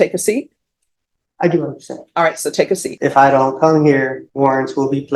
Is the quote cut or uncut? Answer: cut